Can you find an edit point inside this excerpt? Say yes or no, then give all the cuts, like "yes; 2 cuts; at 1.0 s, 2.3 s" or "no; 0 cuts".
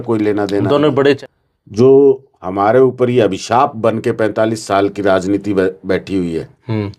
yes; 1 cut; at 1.2 s